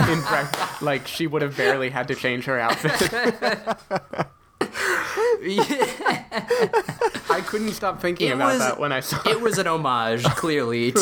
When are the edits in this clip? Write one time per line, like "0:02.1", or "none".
none